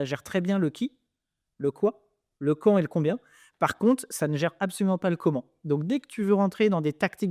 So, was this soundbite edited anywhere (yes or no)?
no